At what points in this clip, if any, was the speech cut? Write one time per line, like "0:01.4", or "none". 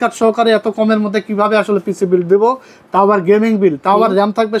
none